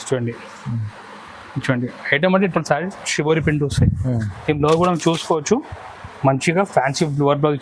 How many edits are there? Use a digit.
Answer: 1